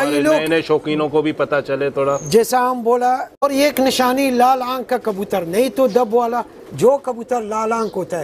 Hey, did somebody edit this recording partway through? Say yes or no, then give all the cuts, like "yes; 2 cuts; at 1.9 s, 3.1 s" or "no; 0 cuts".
yes; 1 cut; at 3.4 s